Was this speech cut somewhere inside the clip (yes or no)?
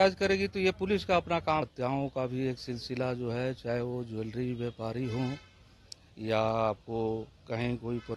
yes